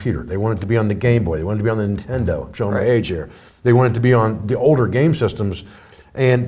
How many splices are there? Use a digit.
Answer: 0